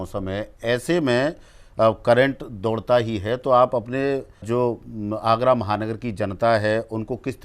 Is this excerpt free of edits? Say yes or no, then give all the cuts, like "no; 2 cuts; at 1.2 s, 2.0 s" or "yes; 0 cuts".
no; 1 cut; at 4.4 s